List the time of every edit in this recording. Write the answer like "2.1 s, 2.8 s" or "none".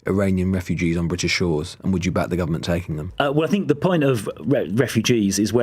3.0 s